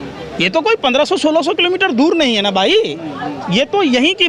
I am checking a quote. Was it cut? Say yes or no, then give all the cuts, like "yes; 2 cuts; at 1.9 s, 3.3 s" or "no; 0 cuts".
no; 0 cuts